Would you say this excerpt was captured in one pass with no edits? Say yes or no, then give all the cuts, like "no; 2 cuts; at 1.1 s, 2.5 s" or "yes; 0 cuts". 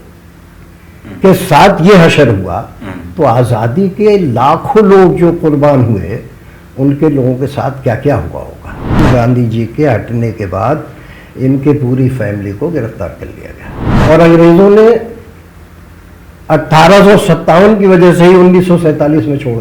no; 2 cuts; at 9.0 s, 13.8 s